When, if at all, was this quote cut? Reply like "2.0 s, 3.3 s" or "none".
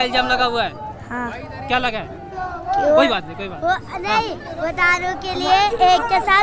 none